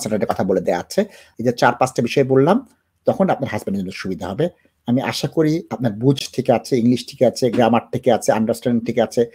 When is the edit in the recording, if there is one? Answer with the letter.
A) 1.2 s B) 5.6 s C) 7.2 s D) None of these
A